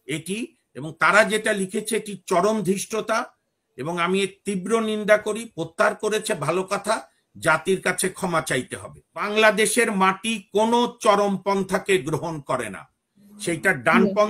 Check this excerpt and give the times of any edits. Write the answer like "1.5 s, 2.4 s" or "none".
9.3 s